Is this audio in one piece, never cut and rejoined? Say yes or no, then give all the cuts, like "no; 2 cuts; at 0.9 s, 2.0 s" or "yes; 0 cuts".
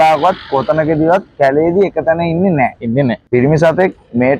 yes; 0 cuts